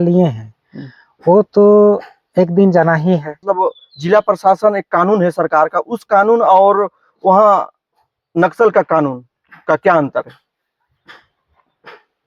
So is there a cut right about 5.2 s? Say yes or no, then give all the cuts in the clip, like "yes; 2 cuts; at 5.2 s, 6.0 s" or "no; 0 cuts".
no; 1 cut; at 3.4 s